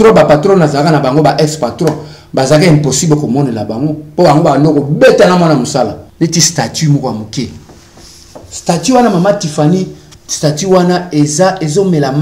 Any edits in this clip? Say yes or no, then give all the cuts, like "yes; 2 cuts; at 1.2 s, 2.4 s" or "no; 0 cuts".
yes; 1 cut; at 6.0 s